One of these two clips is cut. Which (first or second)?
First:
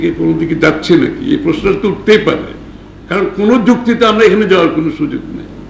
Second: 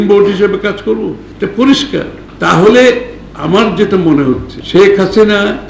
second